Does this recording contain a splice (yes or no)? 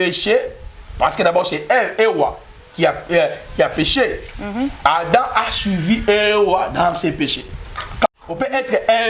yes